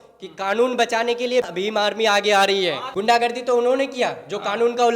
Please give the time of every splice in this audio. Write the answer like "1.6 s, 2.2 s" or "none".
1.5 s, 3.0 s